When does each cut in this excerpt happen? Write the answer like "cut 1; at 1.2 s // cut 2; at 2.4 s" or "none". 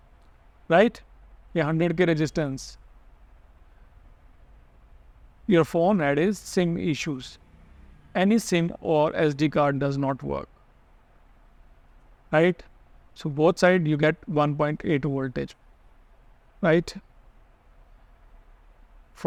none